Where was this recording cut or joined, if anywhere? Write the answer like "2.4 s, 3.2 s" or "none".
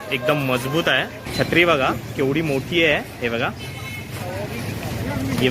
1.2 s